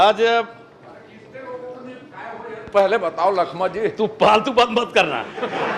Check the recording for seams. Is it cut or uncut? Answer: uncut